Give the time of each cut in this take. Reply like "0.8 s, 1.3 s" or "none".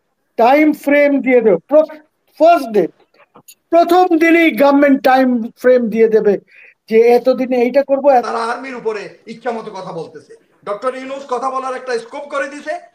8.2 s

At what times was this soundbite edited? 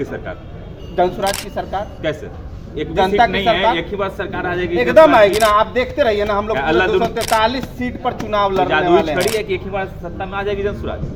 none

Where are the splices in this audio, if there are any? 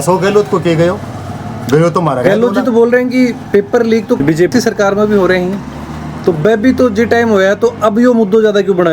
none

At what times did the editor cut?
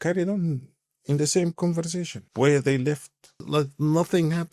2.2 s, 3.4 s

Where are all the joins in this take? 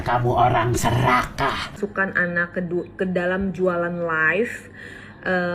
1.8 s

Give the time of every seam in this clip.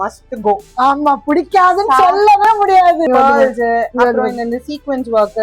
3.1 s

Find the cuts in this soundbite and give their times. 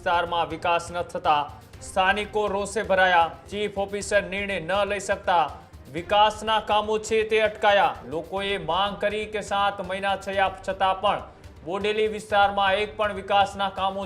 3.4 s, 8.1 s

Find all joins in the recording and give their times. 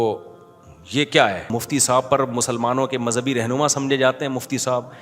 1.5 s

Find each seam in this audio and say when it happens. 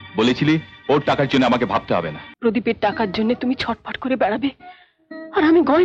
2.2 s

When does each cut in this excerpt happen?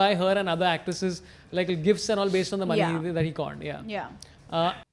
none

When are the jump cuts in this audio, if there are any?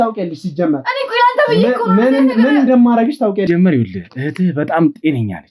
3.4 s

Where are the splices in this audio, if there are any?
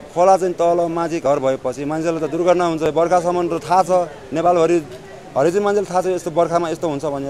none

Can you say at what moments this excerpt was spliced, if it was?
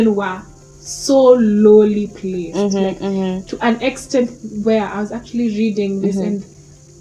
none

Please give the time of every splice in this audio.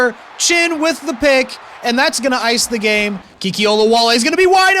3.3 s

